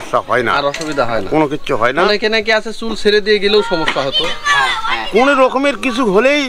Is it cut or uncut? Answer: uncut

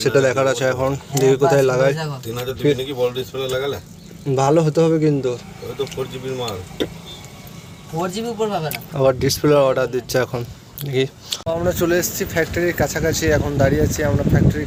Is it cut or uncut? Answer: uncut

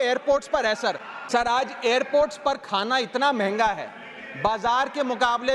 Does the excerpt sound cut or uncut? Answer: cut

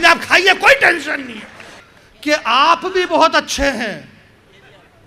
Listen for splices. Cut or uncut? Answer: cut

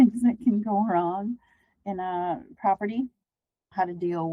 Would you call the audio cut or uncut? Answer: uncut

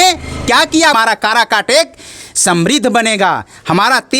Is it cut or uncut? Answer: cut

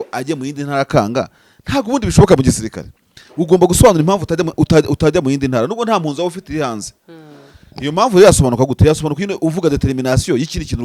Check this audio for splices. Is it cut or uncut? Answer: uncut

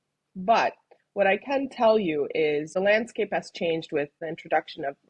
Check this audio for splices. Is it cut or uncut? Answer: cut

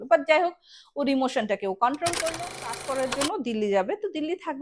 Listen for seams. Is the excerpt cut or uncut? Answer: cut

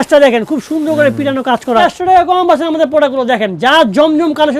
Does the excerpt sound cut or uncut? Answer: cut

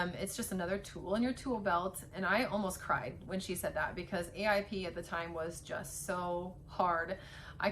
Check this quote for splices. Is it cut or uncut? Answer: uncut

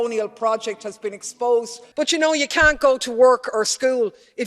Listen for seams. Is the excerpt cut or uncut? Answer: cut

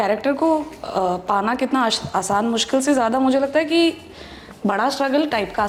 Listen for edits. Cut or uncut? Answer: uncut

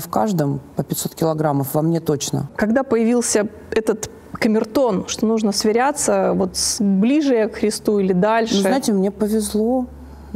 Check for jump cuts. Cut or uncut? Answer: uncut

